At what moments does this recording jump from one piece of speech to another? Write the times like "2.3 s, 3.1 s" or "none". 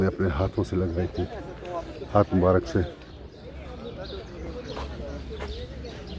none